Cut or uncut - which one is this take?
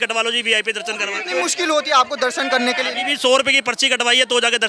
uncut